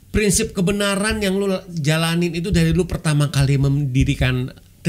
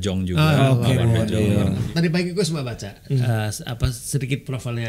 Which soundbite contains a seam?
second; 1 cut; at 1.8 s

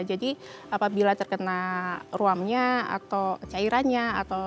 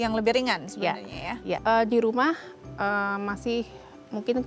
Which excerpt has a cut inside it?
second; 1 cut; at 1.5 s

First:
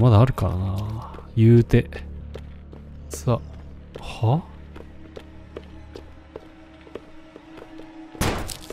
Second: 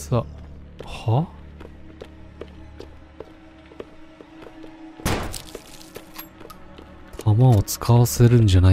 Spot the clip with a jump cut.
first; 1 cut; at 2.2 s

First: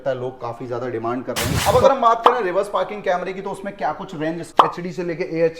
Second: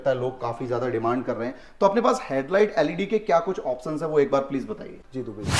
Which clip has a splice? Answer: first; 2 cuts; at 1.5 s, 4.5 s

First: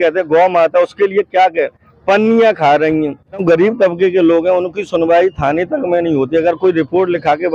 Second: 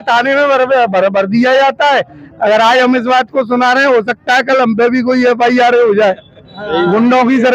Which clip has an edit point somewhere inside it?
first; 1 cut; at 3.4 s

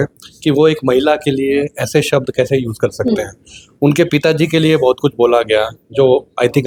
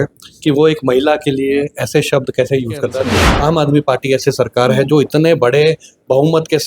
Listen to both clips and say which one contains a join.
second; 1 cut; at 3.2 s

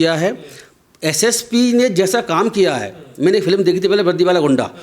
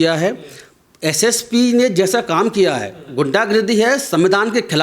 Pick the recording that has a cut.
second; 1 cut; at 3.0 s

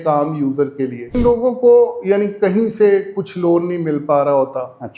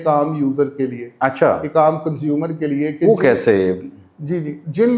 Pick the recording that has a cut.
first; 1 cut; at 1.2 s

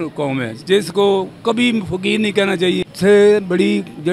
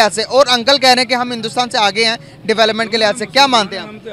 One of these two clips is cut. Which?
first; 1 cut; at 2.8 s

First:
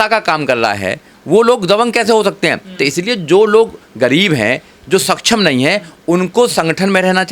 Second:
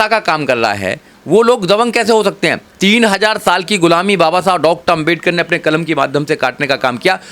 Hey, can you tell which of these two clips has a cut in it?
second; 1 cut; at 2.6 s

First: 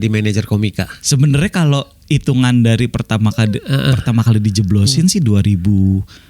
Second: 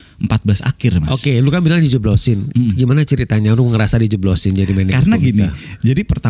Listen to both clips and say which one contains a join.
first; 1 cut; at 1.0 s

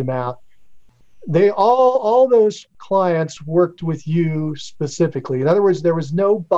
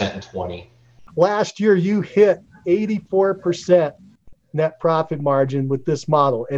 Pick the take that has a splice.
second; 1 cut; at 1.0 s

